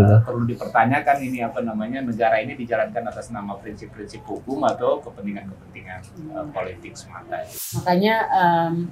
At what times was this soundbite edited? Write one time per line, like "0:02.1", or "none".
0:07.8